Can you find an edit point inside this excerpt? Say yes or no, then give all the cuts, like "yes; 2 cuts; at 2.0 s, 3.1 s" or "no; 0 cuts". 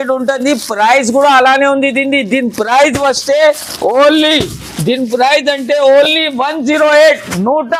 no; 0 cuts